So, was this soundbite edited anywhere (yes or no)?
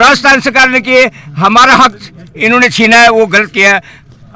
no